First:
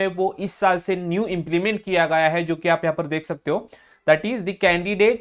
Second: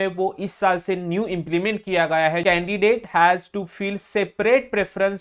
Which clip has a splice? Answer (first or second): second